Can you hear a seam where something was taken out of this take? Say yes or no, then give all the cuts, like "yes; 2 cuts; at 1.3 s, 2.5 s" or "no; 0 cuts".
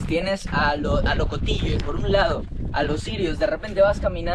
no; 0 cuts